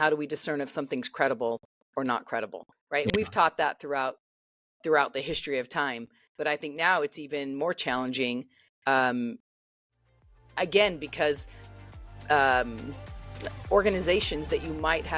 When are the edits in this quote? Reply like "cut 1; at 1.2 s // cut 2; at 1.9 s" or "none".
none